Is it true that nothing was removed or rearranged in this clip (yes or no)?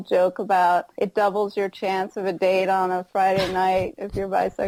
yes